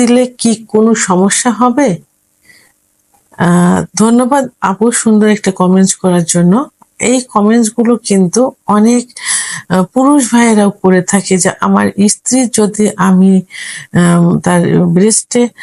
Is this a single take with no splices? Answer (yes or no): yes